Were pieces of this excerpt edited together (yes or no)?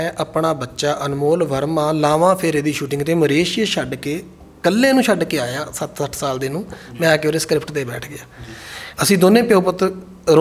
no